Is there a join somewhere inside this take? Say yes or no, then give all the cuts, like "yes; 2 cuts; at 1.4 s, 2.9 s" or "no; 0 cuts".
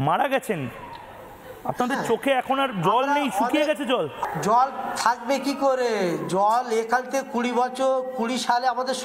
yes; 1 cut; at 4.2 s